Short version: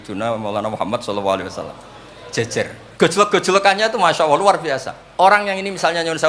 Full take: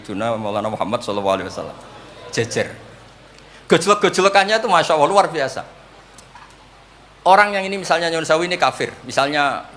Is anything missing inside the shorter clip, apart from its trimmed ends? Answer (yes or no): yes